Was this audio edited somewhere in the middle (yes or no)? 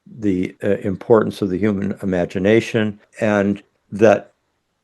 yes